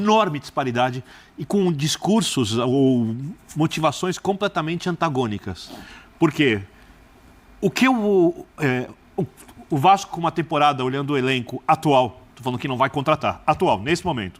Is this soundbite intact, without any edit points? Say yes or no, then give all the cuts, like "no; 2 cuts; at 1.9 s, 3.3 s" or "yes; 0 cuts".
yes; 0 cuts